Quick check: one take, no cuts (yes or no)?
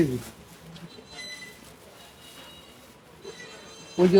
yes